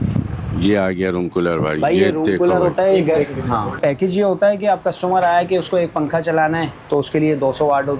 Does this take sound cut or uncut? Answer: cut